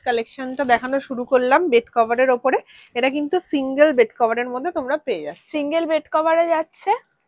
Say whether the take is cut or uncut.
uncut